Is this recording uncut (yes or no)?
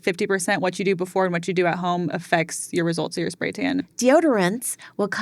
no